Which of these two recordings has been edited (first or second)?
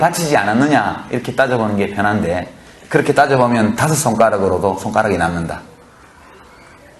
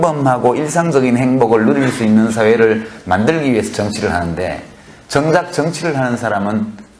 second